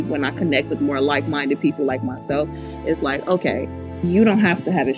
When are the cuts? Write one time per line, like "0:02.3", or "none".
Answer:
0:03.9